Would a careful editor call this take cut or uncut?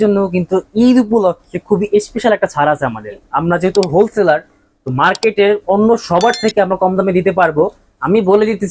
cut